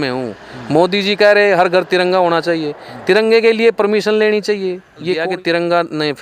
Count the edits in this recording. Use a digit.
1